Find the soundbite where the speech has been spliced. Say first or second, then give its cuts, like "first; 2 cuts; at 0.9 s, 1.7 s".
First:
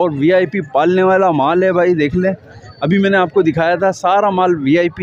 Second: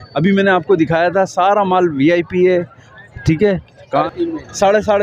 second; 1 cut; at 4.0 s